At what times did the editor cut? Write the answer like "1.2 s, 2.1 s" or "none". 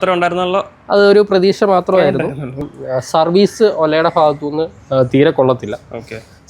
2.7 s